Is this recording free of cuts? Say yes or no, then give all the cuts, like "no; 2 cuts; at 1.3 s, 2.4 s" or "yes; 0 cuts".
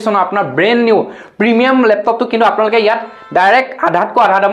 yes; 0 cuts